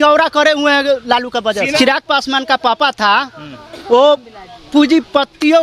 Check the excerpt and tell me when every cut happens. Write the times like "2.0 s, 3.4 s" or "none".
1.7 s